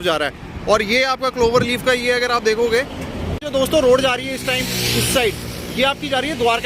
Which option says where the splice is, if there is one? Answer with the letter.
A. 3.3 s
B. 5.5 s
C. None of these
A